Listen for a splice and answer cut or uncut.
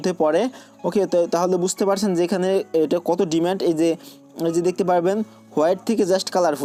uncut